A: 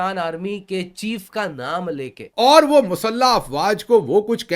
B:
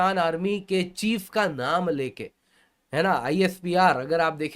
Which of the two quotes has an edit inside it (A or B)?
A